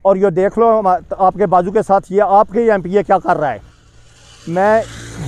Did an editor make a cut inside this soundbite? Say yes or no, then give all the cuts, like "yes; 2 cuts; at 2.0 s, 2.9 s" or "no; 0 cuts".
no; 0 cuts